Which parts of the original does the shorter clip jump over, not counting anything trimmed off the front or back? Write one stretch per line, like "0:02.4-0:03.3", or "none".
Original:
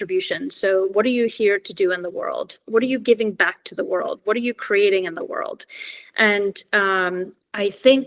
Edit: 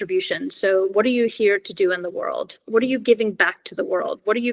none